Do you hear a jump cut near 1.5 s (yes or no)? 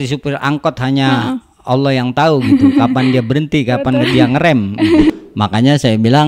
no